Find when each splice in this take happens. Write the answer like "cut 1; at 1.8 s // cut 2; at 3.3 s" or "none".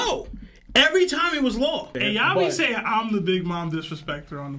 cut 1; at 1.9 s